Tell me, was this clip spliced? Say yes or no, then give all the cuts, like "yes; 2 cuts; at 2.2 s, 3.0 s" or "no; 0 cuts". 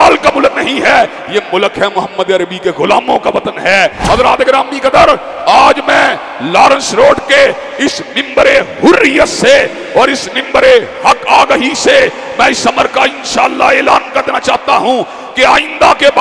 yes; 1 cut; at 4.0 s